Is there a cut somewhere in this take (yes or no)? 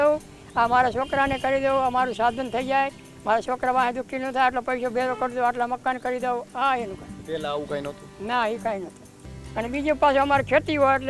no